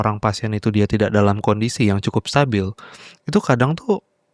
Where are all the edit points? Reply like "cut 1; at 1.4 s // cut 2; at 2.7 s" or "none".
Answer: none